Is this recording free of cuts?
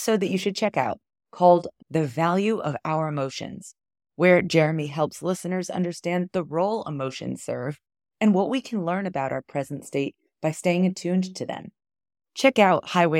yes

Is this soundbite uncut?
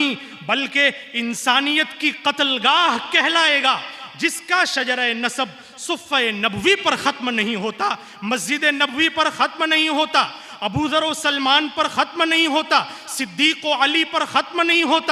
yes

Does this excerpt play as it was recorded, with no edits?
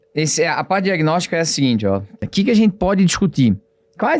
no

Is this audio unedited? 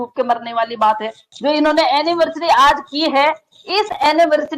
no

